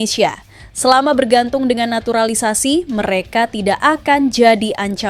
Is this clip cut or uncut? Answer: uncut